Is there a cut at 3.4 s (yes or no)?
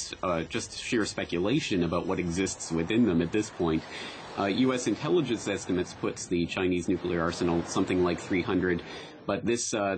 no